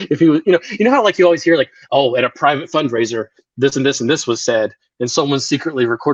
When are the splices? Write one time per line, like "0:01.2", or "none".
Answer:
none